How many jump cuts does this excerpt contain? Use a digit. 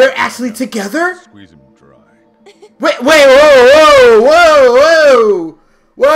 0